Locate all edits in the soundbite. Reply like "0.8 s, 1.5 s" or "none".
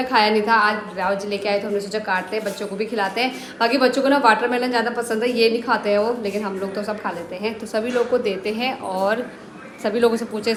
none